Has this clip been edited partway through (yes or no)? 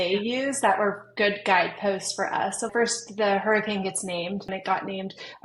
yes